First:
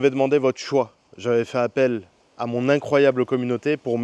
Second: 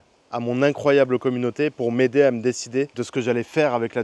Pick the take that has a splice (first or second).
second